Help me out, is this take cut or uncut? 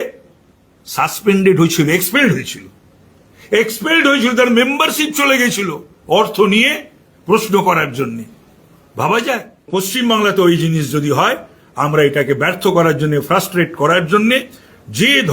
cut